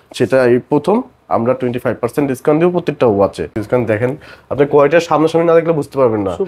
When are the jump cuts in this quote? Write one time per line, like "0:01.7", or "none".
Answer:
0:03.6